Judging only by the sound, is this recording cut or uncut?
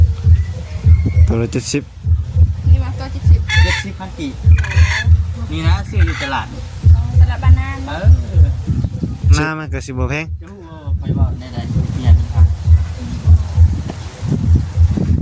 cut